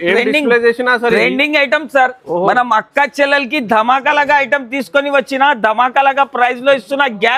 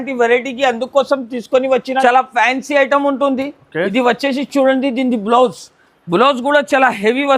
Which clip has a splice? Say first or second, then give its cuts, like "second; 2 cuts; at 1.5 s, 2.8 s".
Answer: second; 1 cut; at 1.9 s